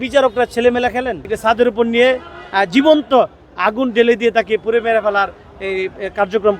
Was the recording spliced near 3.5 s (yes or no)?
no